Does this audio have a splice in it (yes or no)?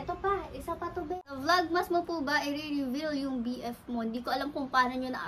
yes